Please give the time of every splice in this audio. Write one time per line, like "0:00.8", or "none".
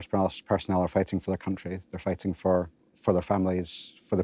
0:02.8

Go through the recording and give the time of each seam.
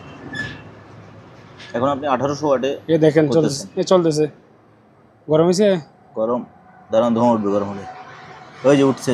none

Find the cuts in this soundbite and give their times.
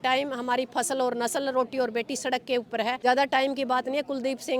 0:03.0

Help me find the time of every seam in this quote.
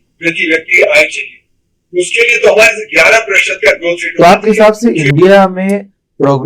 0:04.1

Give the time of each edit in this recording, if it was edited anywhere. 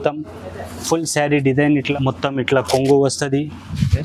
0:01.9

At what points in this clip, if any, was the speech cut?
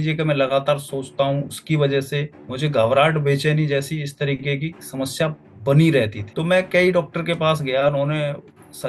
0:02.4
0:06.3

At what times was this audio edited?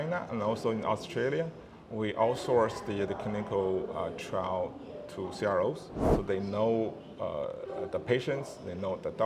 0:06.0

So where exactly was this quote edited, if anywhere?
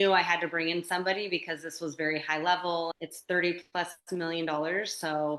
0:02.9

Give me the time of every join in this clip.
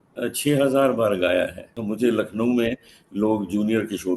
0:01.7

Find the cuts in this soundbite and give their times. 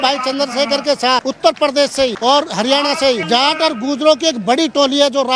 0:01.3
0:02.2
0:03.2

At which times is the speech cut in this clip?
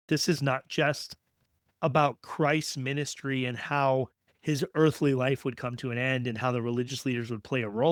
none

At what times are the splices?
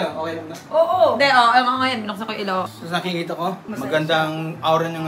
0:01.9
0:03.5

